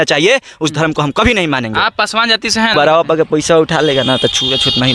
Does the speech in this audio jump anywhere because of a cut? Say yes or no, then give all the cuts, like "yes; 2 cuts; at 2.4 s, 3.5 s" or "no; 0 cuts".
yes; 1 cut; at 2.7 s